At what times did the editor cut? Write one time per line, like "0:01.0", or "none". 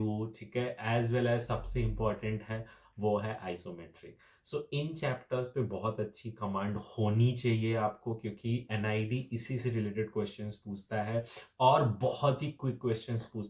none